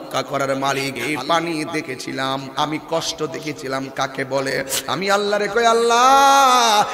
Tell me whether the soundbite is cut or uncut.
cut